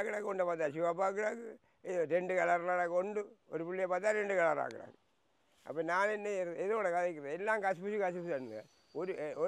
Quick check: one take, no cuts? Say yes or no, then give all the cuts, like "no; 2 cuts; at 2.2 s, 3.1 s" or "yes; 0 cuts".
yes; 0 cuts